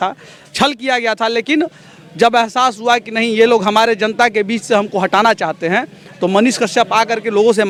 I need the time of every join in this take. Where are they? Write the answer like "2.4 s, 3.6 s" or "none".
none